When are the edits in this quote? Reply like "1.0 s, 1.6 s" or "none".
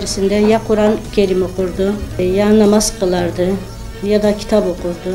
2.2 s